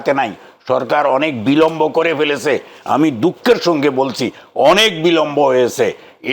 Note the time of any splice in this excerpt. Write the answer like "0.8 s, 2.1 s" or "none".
none